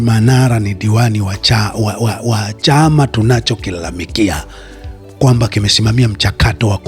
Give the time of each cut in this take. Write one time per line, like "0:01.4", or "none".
none